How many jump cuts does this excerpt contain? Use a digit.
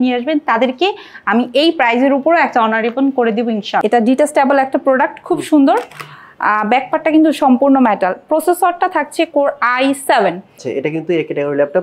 2